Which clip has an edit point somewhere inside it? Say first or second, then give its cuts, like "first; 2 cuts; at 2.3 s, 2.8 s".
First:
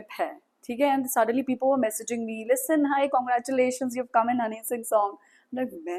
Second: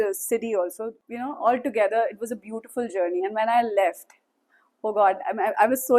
second; 1 cut; at 0.9 s